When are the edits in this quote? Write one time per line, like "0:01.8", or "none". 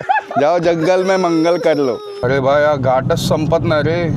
0:02.2